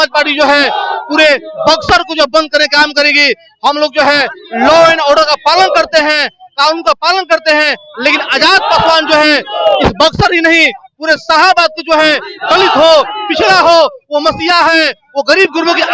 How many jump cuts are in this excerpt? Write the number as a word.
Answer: zero